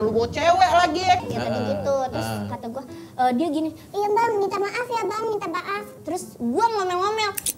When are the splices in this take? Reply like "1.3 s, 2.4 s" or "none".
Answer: none